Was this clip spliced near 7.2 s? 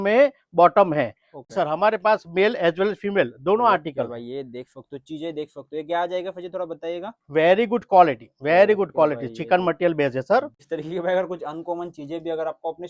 no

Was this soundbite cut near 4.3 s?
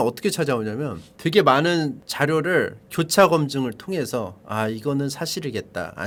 no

